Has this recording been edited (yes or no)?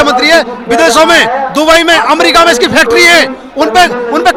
no